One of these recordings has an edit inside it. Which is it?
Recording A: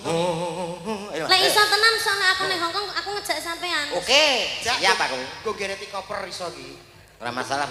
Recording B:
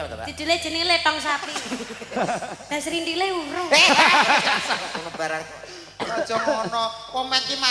B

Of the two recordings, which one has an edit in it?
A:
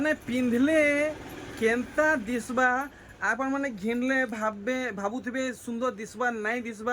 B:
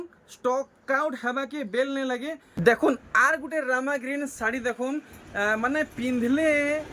B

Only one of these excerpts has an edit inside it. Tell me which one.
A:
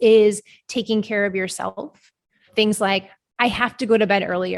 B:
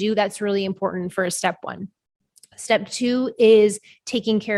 A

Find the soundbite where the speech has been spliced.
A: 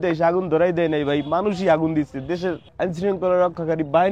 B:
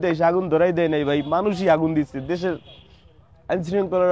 A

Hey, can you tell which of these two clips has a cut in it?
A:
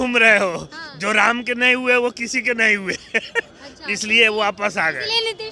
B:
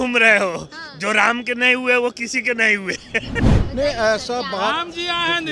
B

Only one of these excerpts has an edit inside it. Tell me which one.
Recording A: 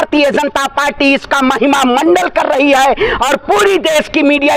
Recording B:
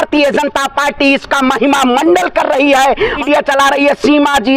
B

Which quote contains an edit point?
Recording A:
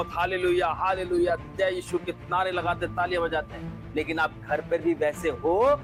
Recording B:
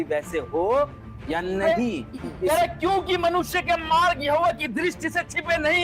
B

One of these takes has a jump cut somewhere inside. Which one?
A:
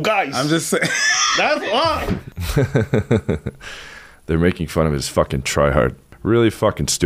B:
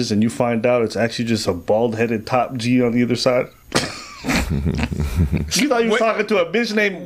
A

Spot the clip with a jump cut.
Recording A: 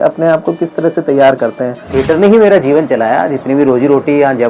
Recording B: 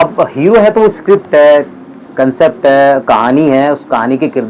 A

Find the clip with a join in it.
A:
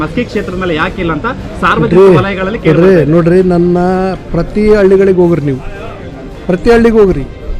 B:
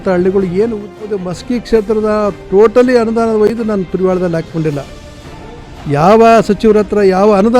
B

